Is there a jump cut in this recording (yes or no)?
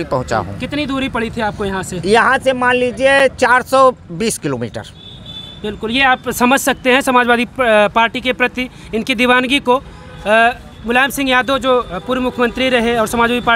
no